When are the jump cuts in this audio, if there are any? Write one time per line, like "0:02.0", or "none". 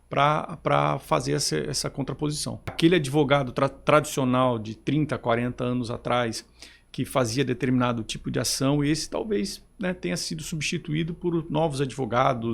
0:02.8